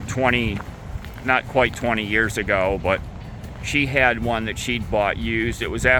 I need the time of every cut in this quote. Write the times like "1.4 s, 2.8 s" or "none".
none